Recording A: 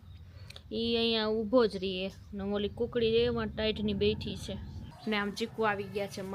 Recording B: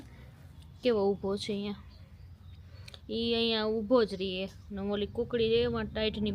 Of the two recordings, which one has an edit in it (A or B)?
A